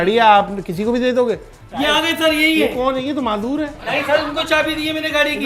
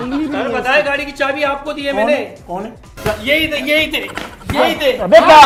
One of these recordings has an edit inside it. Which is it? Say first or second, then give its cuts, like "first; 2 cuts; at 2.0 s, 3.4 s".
first; 1 cut; at 1.6 s